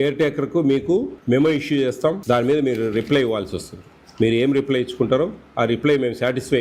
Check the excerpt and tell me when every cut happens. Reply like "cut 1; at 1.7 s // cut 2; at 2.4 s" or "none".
cut 1; at 1.1 s // cut 2; at 2.2 s